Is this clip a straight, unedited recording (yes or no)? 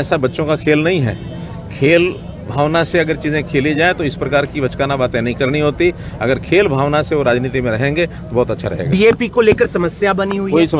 yes